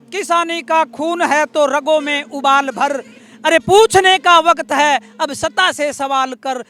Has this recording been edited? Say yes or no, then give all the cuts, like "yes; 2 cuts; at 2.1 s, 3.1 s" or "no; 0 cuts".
no; 0 cuts